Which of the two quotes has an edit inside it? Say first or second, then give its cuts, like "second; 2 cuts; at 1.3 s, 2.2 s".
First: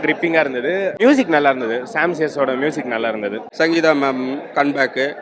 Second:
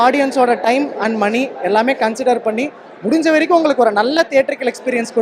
first; 2 cuts; at 0.9 s, 3.4 s